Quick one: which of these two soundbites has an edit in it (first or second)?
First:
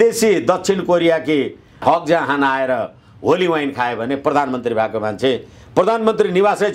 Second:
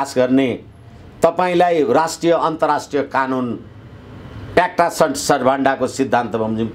first